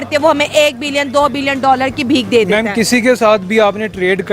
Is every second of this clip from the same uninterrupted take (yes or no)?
yes